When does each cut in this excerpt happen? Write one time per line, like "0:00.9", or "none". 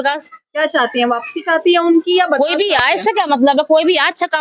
none